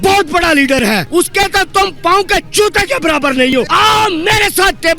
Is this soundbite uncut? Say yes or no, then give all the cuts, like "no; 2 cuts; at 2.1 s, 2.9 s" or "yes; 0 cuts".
no; 2 cuts; at 1.0 s, 3.7 s